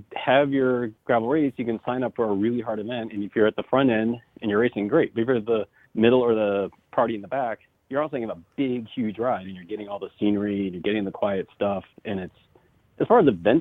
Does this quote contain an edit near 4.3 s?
no; 4 cuts; at 0.9 s, 5.8 s, 6.8 s, 7.7 s

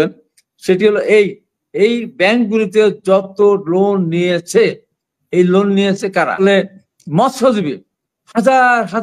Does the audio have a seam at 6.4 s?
yes; 1 cut; at 6.4 s

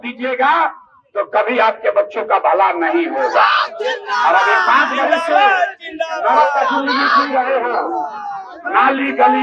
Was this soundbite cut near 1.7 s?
no; 0 cuts

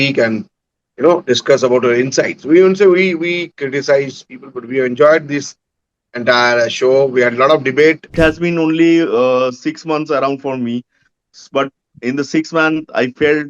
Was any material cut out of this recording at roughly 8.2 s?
yes; 1 cut; at 8.2 s

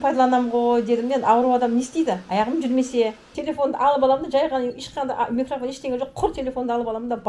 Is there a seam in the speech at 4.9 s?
no; 1 cut; at 3.3 s

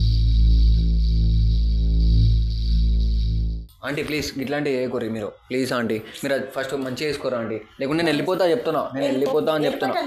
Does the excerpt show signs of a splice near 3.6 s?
yes; 1 cut; at 3.6 s

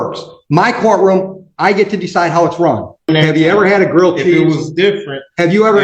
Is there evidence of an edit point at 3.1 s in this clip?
yes; 1 cut; at 3.1 s

